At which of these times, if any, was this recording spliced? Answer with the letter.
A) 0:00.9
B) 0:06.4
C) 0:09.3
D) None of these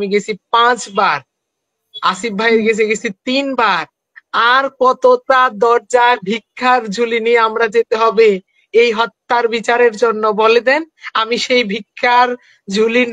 D